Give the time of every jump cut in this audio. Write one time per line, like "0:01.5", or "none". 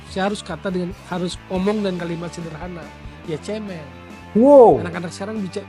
none